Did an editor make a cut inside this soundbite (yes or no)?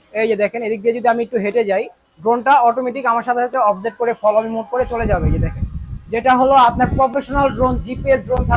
no